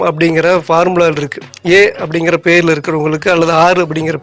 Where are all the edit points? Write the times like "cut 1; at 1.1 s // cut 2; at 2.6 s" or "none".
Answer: none